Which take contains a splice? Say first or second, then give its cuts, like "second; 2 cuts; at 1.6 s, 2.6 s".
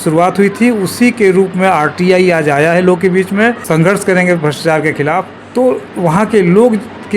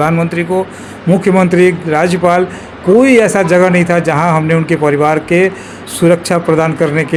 first; 2 cuts; at 3.6 s, 5.4 s